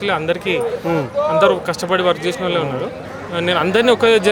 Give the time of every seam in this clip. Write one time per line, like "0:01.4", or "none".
0:03.0